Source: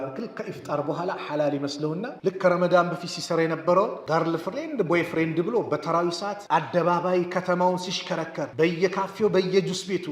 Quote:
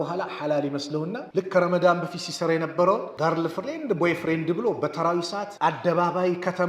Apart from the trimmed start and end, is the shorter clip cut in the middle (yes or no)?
no